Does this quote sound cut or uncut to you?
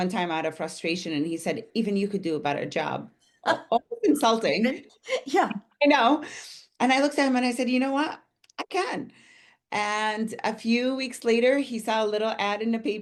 uncut